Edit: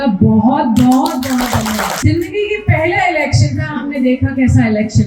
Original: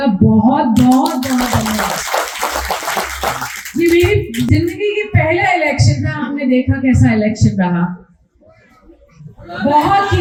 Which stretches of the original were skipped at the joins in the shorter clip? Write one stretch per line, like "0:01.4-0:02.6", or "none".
0:02.0-0:04.5